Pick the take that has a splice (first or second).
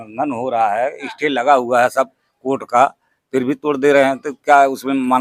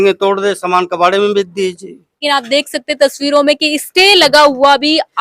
second